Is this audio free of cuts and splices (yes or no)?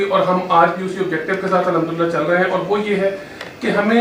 yes